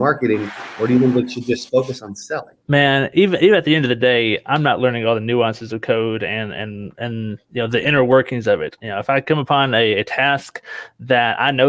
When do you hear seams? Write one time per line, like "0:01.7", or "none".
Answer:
0:02.5